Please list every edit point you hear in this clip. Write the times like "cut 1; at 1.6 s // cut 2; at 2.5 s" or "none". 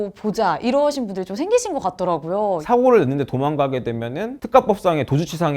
cut 1; at 2.6 s